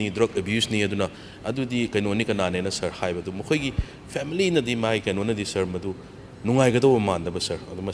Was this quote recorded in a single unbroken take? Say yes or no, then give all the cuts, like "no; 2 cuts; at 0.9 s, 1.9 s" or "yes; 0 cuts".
yes; 0 cuts